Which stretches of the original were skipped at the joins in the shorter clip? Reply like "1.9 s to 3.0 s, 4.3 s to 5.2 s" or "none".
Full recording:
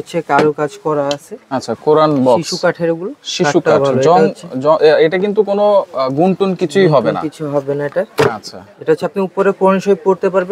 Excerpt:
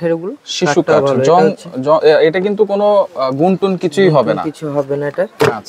none